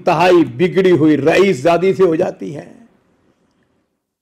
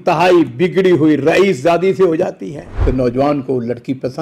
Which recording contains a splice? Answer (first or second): second